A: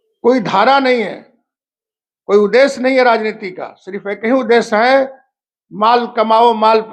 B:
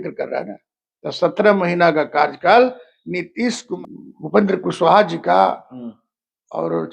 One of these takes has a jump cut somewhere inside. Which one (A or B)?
B